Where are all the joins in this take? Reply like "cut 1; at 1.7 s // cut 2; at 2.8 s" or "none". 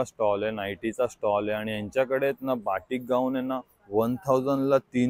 none